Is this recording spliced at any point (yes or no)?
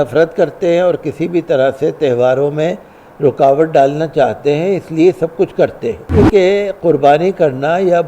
yes